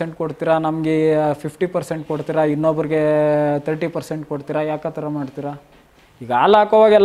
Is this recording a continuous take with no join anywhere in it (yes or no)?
yes